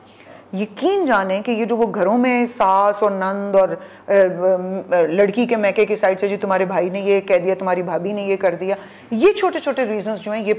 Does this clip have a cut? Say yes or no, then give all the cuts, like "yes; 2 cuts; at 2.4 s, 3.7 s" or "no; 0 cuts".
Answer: no; 0 cuts